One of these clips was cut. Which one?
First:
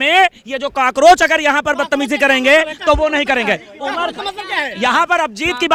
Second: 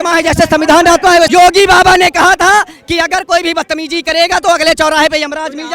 second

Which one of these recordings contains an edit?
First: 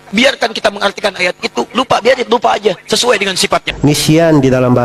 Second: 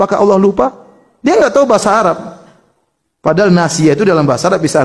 first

